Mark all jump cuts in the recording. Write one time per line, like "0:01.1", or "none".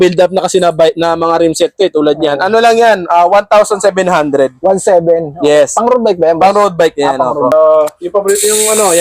0:07.5